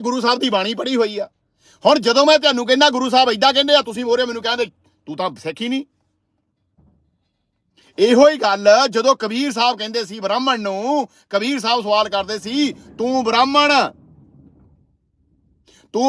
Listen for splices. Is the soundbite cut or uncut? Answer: uncut